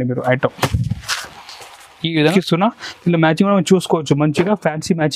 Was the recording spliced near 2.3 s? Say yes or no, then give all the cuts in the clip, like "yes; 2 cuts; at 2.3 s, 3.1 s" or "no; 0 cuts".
yes; 1 cut; at 2.3 s